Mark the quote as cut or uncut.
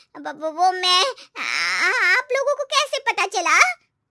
uncut